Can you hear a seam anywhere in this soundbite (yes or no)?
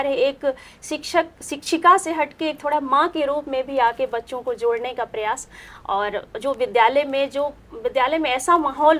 no